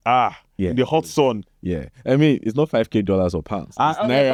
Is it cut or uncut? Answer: uncut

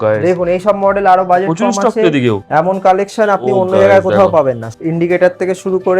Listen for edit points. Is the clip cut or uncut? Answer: cut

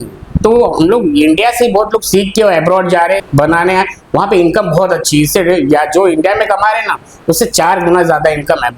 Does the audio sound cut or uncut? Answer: cut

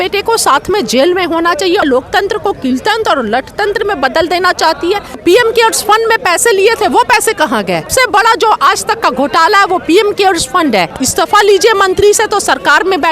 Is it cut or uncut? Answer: cut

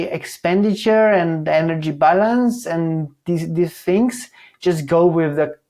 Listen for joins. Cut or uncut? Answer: uncut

